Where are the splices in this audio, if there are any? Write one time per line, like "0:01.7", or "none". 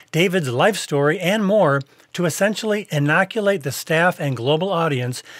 none